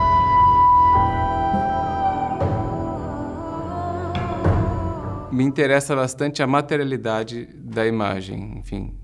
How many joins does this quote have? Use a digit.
1